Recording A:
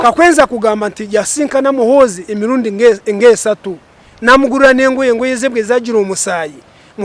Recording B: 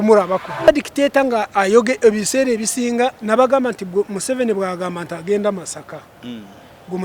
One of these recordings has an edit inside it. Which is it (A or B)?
B